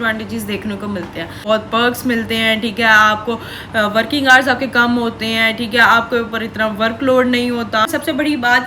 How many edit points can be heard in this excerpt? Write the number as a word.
two